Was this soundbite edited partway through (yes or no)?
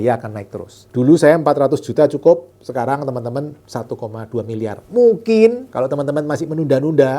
yes